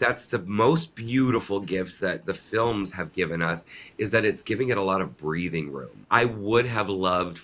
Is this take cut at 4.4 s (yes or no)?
no